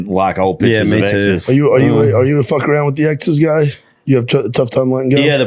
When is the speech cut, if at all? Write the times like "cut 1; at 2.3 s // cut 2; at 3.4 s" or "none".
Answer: cut 1; at 1.4 s